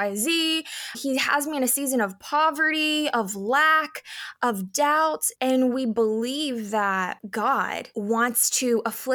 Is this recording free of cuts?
no; 1 cut; at 1.0 s

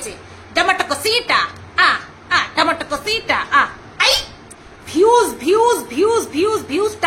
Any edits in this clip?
yes; 1 cut; at 4.3 s

